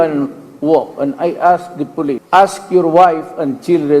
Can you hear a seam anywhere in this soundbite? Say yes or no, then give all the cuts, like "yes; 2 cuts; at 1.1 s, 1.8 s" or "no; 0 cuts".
yes; 1 cut; at 2.2 s